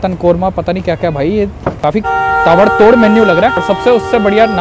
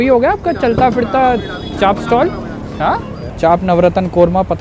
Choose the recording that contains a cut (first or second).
first